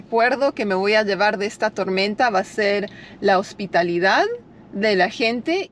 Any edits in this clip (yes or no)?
no